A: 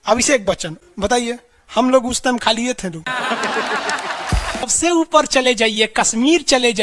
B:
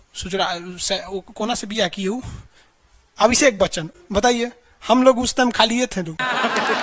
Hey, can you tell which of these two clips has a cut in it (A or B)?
A